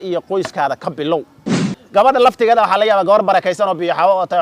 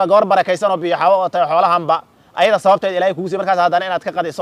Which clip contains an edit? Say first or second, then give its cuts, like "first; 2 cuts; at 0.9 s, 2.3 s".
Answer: first; 1 cut; at 1.3 s